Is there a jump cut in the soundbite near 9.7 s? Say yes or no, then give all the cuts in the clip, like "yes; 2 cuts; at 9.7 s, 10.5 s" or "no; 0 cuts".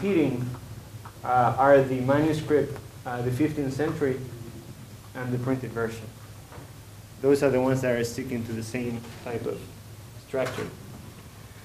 yes; 1 cut; at 9.7 s